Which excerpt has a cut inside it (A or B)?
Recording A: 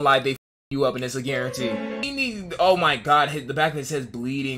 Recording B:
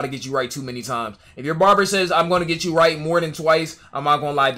A